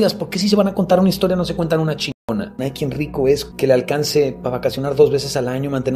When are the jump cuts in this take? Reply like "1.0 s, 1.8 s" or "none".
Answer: 2.6 s, 3.5 s